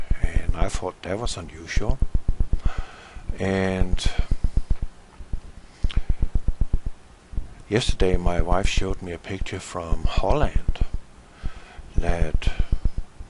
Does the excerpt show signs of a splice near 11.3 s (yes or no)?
no